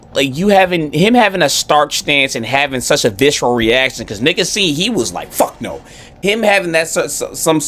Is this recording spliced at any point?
yes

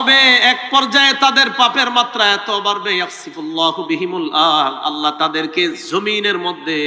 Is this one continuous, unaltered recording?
yes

